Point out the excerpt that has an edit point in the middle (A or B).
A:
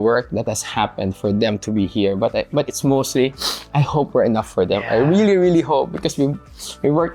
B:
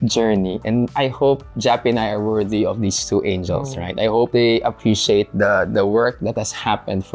B